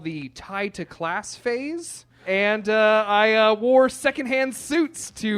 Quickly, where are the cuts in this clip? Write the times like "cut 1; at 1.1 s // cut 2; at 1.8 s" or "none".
cut 1; at 2.2 s